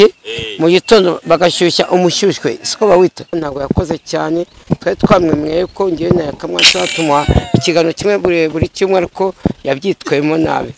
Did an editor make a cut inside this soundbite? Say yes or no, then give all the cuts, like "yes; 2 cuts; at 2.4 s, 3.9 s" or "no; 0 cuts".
yes; 1 cut; at 3.4 s